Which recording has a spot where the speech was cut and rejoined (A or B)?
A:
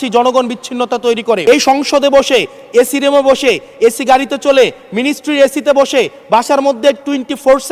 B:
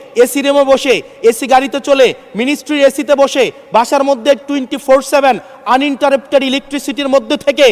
A